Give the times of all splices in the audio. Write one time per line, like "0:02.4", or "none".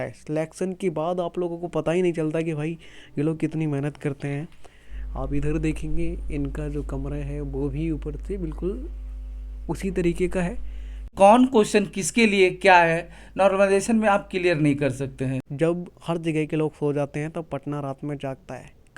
0:11.1
0:15.4